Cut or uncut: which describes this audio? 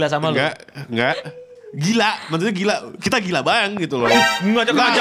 uncut